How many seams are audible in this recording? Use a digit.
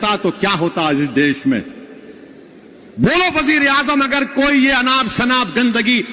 0